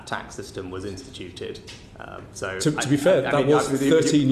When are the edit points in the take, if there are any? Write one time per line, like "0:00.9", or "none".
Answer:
none

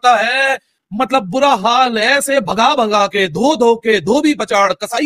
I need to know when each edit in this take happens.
none

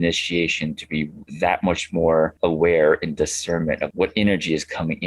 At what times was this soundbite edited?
0:01.2
0:02.3
0:03.9

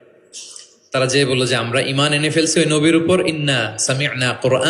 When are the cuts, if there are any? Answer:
none

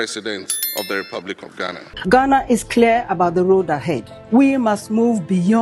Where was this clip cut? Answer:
0:01.8

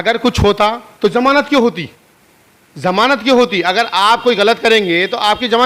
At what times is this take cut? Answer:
none

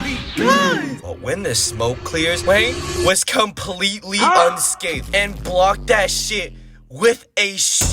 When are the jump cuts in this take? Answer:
0:01.1

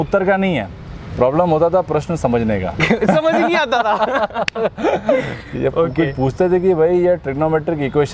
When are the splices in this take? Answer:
none

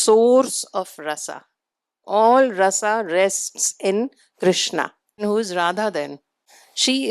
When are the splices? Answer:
0:05.2

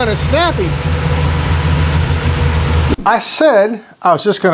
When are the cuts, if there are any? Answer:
0:02.9

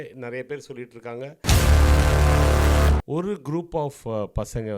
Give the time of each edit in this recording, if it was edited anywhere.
0:01.3
0:03.0

